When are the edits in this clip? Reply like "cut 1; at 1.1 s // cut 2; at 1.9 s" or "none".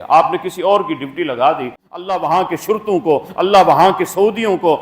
cut 1; at 1.8 s